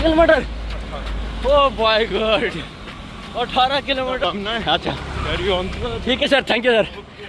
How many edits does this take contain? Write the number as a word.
one